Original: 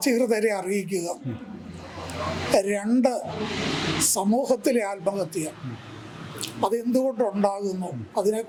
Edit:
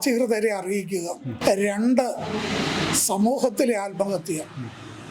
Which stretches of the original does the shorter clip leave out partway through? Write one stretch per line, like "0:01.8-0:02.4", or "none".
0:01.4-0:02.4